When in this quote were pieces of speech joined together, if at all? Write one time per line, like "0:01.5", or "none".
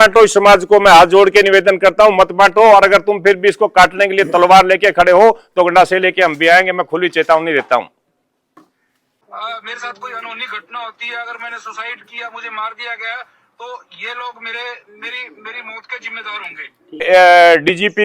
0:09.1
0:17.0